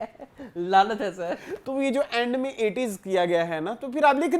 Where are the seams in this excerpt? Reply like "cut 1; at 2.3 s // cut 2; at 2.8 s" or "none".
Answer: cut 1; at 1.5 s